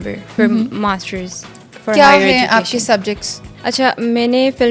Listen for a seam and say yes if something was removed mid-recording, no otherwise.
no